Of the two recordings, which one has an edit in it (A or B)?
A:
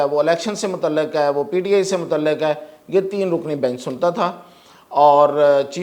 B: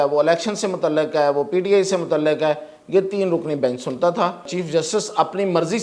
B